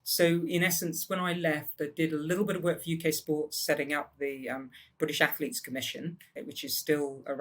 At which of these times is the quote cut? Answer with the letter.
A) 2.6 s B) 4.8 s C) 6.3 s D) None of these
C